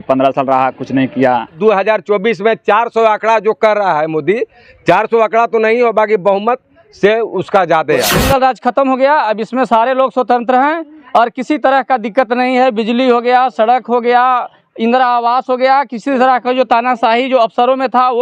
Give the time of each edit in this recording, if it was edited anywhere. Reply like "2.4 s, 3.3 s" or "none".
1.6 s, 8.2 s

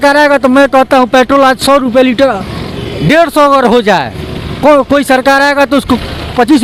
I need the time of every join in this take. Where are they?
none

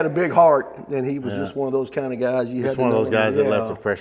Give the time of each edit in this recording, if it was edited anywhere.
none

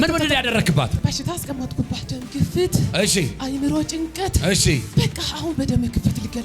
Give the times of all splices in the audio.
1.0 s, 2.1 s, 4.9 s

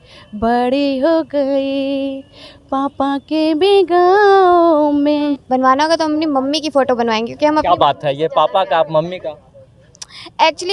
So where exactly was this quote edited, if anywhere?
5.3 s

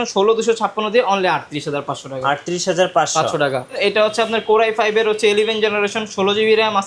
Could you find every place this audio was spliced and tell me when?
3.8 s

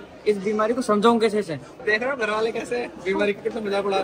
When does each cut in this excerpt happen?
1.7 s

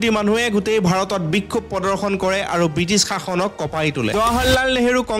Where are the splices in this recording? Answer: 4.1 s

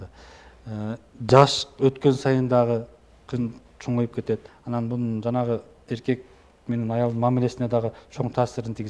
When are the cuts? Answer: 4.5 s

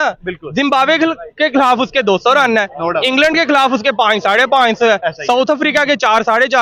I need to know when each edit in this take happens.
none

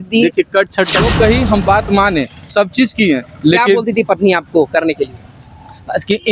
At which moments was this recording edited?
1.1 s

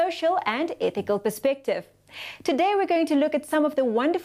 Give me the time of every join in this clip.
3.0 s

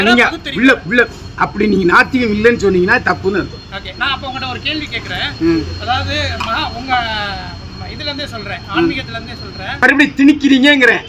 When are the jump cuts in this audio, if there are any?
9.8 s

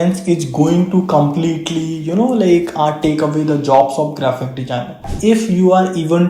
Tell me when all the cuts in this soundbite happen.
5.1 s

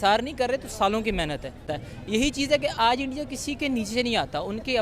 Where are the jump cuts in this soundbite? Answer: 1.5 s

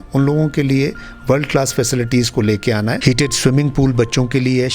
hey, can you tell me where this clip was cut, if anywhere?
3.0 s

